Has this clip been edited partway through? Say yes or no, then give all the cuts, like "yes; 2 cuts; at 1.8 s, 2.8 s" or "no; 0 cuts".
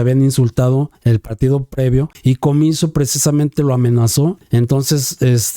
yes; 3 cuts; at 0.9 s, 2.1 s, 4.4 s